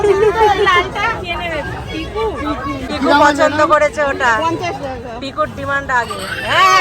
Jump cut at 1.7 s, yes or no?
no